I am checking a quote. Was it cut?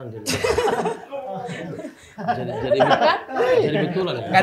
no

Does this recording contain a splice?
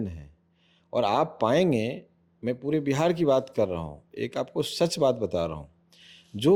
no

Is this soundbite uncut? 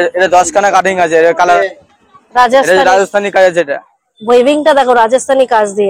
no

